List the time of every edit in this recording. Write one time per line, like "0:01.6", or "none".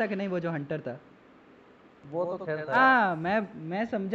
0:02.8